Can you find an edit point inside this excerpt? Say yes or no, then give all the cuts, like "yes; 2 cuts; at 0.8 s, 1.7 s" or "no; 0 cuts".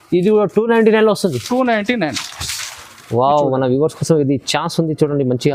no; 0 cuts